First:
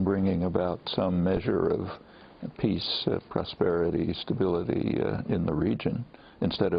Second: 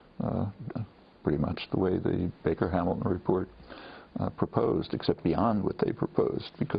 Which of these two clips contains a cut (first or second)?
second